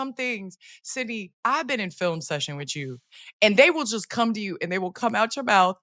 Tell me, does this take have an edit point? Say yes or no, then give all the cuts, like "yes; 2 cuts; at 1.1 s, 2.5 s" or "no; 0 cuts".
no; 0 cuts